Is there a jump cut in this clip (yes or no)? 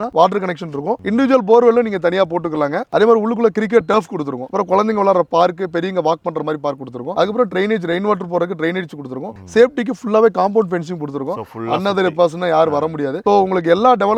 no